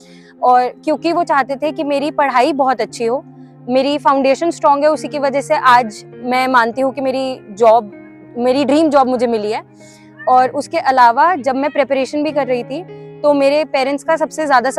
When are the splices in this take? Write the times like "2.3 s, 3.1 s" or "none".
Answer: none